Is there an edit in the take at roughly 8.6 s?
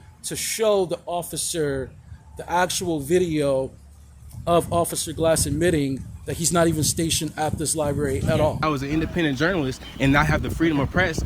yes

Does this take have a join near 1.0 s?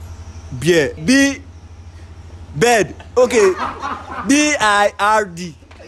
yes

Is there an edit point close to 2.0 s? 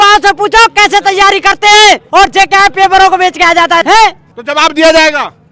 yes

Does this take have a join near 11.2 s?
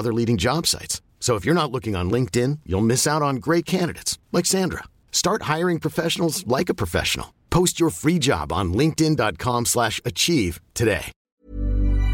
yes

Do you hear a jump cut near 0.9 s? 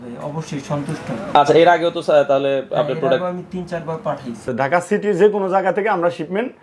no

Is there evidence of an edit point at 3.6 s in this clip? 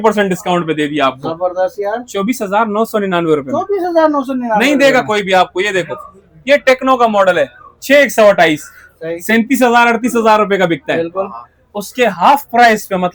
no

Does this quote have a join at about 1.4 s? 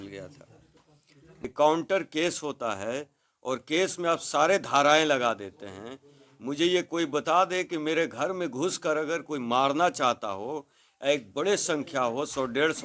yes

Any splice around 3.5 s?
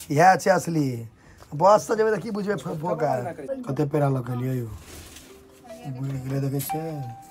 yes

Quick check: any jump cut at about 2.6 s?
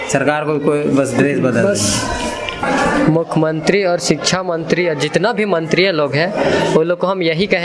yes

